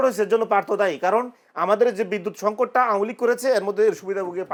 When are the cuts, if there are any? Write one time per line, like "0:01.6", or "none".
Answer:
none

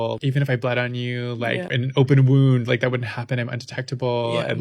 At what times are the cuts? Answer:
0:01.8

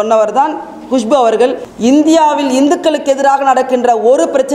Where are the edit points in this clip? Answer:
0:01.7

